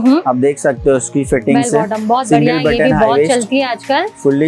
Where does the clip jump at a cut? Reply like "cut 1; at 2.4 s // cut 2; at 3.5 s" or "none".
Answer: none